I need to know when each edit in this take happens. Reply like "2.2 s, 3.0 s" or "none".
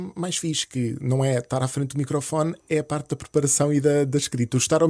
none